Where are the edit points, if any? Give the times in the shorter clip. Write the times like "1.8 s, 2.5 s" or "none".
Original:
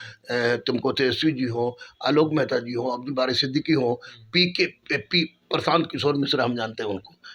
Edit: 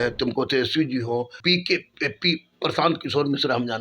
1.3 s